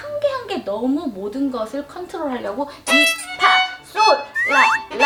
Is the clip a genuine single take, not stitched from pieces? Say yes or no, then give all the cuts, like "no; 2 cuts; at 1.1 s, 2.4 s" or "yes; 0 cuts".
yes; 0 cuts